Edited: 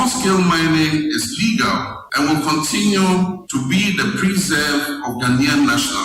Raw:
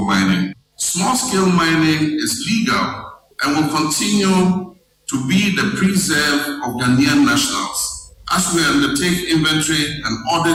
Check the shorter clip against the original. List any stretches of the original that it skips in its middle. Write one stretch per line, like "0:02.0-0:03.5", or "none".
0:03.1-0:03.3
0:04.7-0:05.0